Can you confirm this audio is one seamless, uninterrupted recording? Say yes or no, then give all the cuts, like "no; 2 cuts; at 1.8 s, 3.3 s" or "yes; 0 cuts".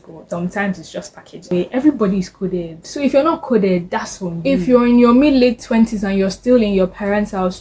no; 2 cuts; at 1.3 s, 4.4 s